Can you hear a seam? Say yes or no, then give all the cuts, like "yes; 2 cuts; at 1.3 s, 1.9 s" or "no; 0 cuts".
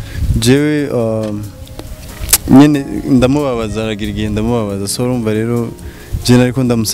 no; 0 cuts